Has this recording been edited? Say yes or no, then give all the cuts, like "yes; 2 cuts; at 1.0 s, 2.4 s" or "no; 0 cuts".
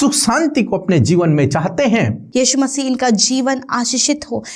yes; 1 cut; at 2.2 s